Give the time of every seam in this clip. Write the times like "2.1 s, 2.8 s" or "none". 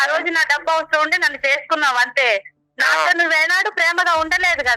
none